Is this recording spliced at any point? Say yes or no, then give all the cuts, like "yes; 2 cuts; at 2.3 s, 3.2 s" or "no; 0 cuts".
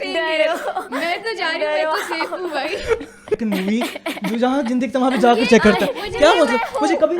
yes; 1 cut; at 3.3 s